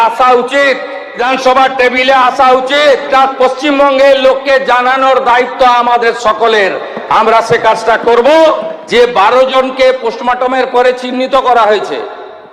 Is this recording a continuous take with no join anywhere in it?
no; 3 cuts; at 1.1 s, 3.1 s, 8.7 s

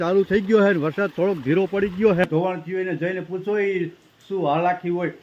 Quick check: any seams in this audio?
yes; 1 cut; at 2.2 s

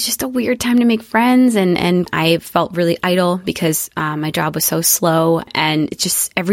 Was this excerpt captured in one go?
no; 2 cuts; at 2.0 s, 5.5 s

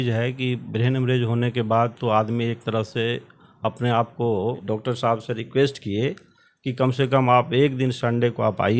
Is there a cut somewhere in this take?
yes; 1 cut; at 4.6 s

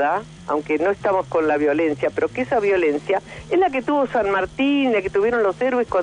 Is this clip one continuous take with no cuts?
yes; 0 cuts

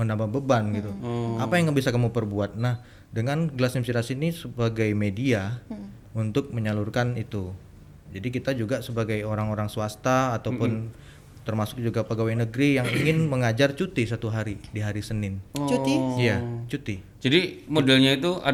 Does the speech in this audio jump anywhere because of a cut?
no; 0 cuts

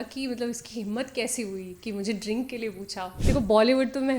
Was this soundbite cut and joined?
yes; 1 cut; at 3.2 s

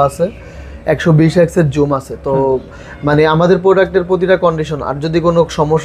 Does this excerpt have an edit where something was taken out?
no; 0 cuts

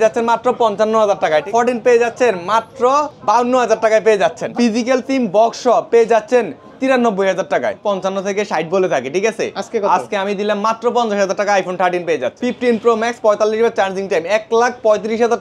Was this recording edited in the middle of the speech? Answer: yes; 5 cuts; at 1.5 s, 3.1 s, 4.5 s, 7.8 s, 12.3 s

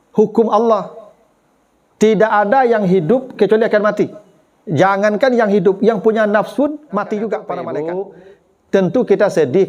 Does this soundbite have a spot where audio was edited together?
yes; 1 cut; at 7.7 s

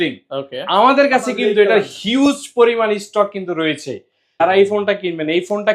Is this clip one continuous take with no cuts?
no; 1 cut; at 4.2 s

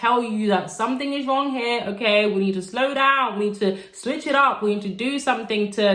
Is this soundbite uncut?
yes; 0 cuts

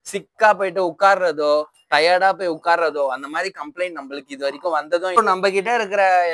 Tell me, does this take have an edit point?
yes; 1 cut; at 5.2 s

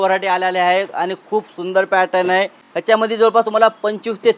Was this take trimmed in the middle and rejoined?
yes; 1 cut; at 2.6 s

